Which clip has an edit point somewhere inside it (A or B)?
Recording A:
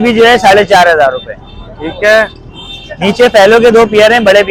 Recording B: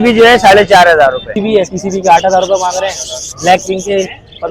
B